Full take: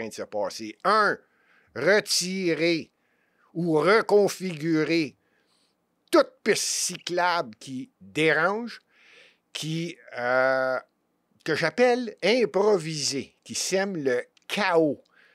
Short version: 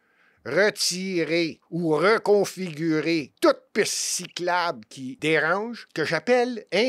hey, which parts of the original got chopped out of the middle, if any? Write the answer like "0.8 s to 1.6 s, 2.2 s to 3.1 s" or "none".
2.9 s to 3.5 s, 5.1 s to 6.0 s, 7.7 s to 8.0 s, 8.7 s to 11.3 s